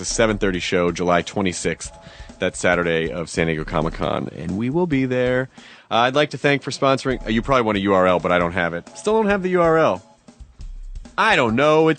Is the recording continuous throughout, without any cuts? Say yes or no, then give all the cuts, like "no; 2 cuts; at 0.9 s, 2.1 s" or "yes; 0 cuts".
no; 1 cut; at 2.4 s